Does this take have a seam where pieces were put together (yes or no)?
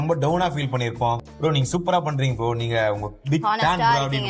yes